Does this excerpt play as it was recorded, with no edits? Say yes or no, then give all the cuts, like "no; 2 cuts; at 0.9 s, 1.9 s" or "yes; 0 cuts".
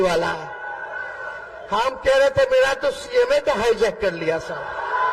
yes; 0 cuts